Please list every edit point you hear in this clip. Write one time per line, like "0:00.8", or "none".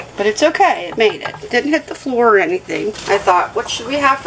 0:02.9